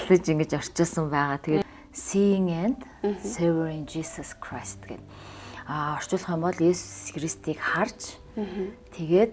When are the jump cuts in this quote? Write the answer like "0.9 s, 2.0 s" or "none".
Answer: 1.6 s

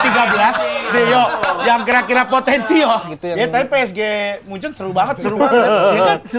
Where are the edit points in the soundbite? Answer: 3.1 s

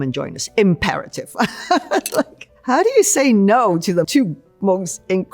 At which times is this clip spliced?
4.1 s

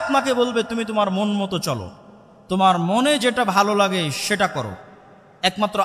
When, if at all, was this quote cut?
none

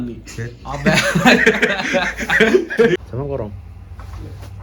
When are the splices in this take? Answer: 3.0 s

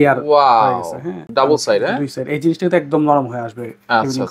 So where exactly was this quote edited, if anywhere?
1.2 s

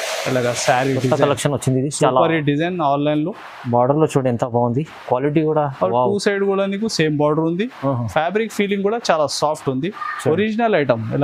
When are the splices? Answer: none

